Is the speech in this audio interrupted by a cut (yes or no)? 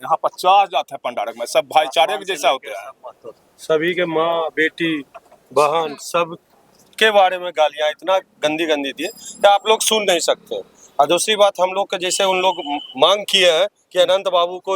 no